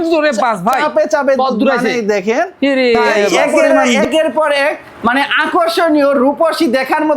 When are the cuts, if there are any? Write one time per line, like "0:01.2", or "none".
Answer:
0:03.8